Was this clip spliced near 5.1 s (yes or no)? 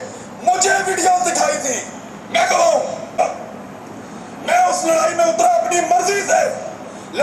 no